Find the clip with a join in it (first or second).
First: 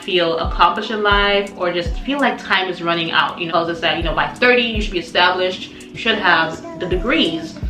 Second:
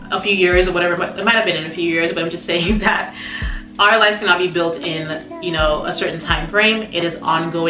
first